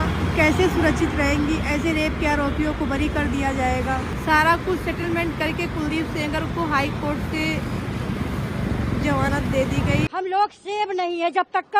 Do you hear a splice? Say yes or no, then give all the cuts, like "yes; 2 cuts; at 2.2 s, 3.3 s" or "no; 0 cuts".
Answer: yes; 2 cuts; at 4.1 s, 10.1 s